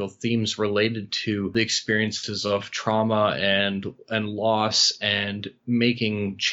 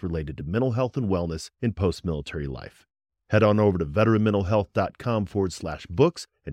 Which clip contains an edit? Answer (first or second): first